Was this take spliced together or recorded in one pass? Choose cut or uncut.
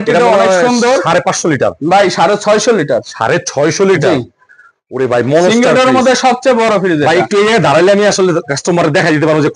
uncut